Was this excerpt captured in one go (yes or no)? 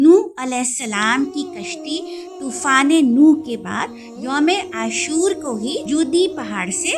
yes